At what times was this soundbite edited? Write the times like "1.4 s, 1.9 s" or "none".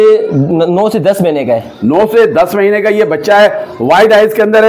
none